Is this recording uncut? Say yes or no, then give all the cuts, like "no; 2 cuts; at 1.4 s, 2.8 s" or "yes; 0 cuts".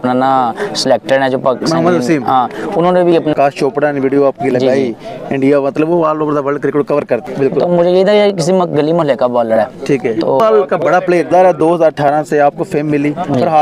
no; 3 cuts; at 3.3 s, 7.2 s, 10.4 s